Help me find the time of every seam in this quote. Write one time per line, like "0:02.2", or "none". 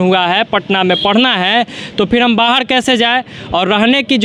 none